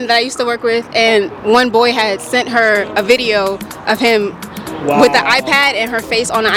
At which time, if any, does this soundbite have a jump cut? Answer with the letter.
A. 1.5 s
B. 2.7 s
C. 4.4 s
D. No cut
D